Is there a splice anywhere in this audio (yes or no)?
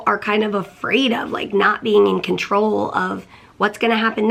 no